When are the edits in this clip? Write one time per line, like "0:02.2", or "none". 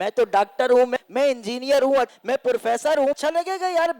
0:00.9
0:02.1
0:03.2

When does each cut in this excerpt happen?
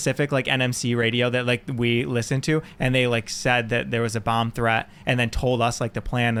none

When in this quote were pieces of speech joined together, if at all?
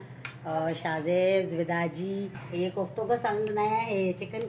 0:02.4

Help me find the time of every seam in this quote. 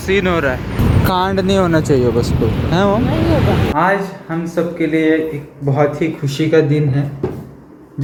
none

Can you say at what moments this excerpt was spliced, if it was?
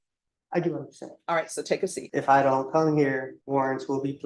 0:02.0
0:03.3

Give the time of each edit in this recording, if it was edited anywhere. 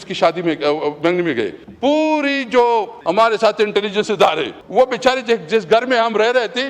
0:01.6
0:02.9
0:04.5

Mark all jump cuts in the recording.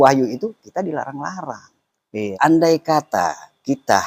0:02.2

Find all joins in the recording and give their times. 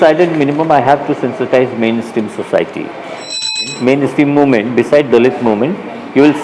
0:03.6

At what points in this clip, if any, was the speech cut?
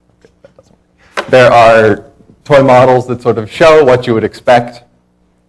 0:01.7

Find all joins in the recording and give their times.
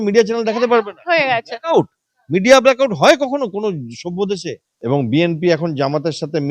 0:04.7

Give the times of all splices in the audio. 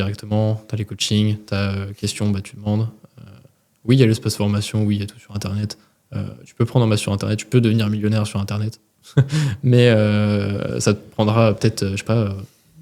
none

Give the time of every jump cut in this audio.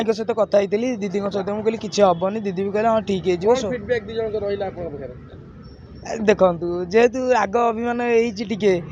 none

